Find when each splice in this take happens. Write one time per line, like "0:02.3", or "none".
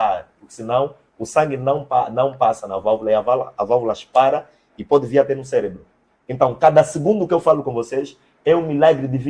none